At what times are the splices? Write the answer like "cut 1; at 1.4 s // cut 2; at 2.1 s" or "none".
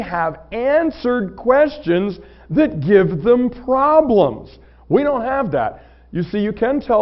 none